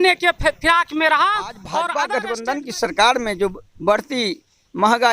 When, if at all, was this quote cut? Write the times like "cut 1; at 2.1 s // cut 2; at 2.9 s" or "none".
cut 1; at 2.0 s

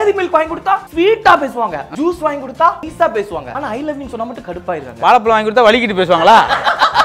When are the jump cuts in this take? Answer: cut 1; at 0.9 s // cut 2; at 1.9 s // cut 3; at 3.4 s

